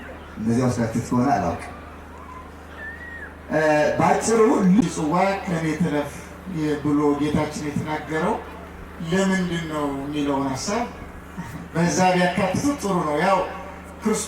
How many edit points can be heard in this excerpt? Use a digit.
1